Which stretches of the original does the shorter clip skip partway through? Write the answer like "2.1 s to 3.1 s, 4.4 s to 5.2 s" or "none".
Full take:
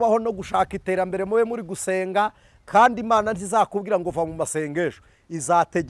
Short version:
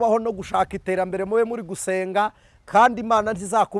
none